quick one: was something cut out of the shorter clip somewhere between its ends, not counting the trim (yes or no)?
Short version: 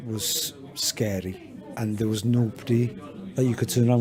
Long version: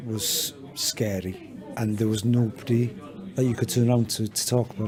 no